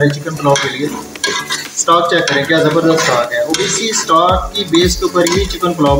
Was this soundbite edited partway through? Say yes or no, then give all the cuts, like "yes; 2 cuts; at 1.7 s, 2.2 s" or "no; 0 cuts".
yes; 1 cut; at 1.1 s